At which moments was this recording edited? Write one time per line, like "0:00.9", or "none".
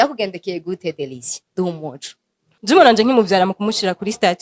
0:02.5